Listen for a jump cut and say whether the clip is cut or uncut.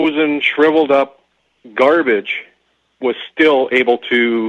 uncut